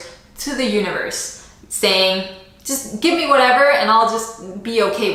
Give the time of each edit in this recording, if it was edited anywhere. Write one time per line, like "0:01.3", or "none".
none